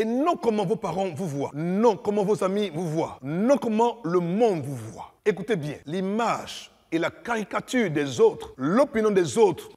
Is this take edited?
yes; 3 cuts; at 1.5 s, 3.2 s, 5.8 s

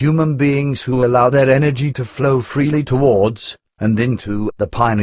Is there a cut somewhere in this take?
yes; 1 cut; at 4.1 s

